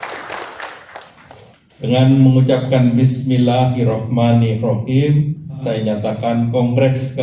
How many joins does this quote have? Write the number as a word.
one